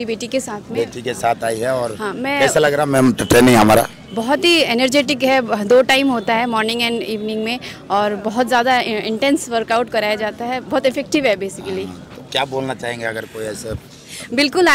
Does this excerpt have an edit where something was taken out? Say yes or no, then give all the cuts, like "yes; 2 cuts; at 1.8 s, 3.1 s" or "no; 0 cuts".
no; 0 cuts